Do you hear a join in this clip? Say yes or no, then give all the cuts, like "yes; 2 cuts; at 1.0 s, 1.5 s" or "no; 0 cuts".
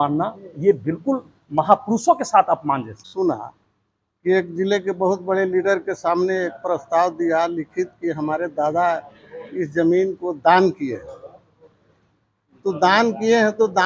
yes; 1 cut; at 3.1 s